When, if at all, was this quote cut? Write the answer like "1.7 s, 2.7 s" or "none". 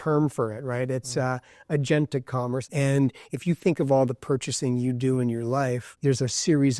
2.7 s, 5.9 s